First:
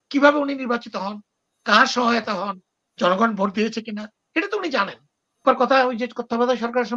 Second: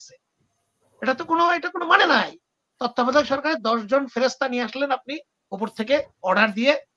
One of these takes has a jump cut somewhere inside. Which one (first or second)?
first